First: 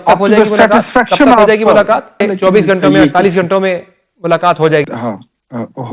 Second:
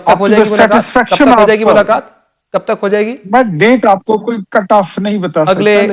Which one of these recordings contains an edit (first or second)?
first